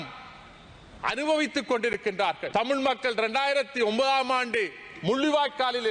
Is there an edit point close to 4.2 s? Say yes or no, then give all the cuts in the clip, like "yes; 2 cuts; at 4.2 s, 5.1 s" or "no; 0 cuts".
no; 1 cut; at 2.4 s